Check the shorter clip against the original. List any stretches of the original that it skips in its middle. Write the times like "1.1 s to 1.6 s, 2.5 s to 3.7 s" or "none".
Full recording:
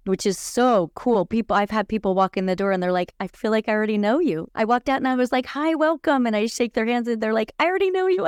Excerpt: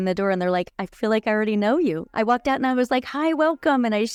none